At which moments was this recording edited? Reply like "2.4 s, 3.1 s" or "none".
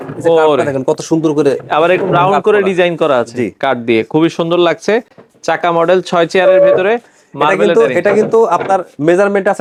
none